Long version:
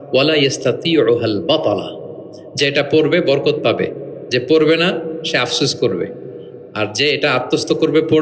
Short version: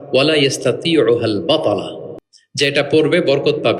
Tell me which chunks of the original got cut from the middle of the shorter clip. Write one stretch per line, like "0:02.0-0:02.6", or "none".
none